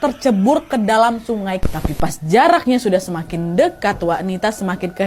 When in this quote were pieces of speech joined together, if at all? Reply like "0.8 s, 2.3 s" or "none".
1.6 s